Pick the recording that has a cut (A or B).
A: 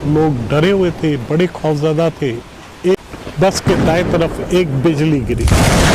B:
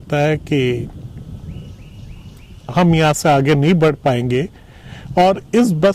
A